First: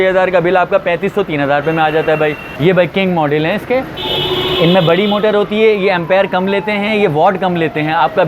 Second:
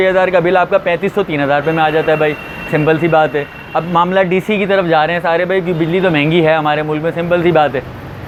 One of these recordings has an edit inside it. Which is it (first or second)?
first